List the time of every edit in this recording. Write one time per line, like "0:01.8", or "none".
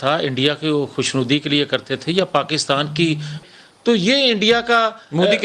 0:03.4